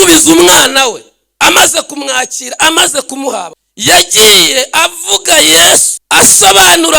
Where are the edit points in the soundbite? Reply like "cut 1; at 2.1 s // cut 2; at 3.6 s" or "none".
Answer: cut 1; at 3.6 s // cut 2; at 5.9 s